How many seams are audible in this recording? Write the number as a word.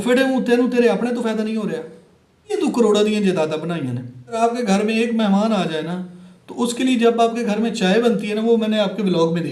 two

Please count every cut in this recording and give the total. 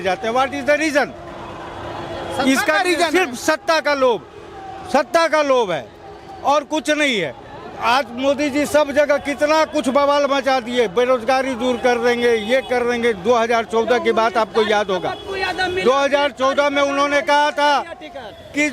zero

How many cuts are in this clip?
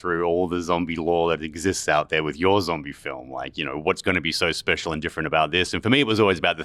zero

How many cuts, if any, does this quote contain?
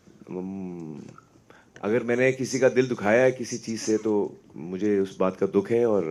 zero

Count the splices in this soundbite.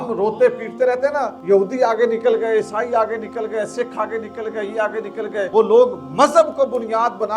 two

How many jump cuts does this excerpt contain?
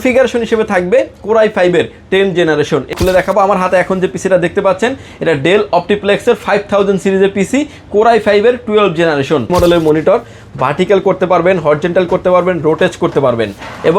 two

